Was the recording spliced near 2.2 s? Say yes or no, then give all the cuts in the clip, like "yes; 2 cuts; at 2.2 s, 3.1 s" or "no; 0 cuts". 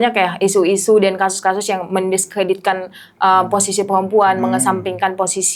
no; 0 cuts